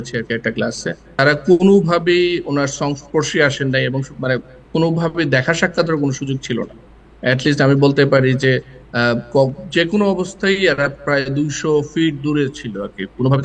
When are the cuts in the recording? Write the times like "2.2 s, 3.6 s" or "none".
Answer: 1.2 s